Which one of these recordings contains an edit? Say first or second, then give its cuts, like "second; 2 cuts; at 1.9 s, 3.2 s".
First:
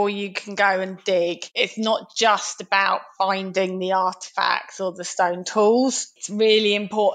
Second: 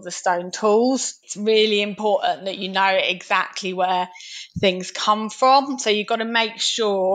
first; 1 cut; at 1.6 s